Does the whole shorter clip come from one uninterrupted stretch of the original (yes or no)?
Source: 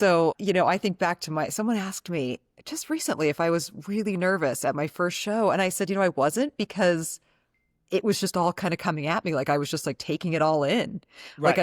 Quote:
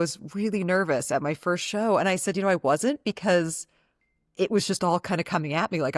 yes